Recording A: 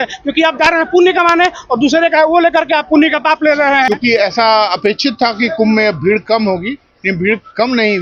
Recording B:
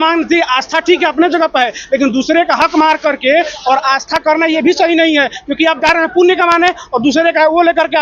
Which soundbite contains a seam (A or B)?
A